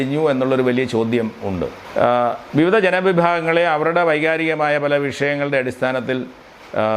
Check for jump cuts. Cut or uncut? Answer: cut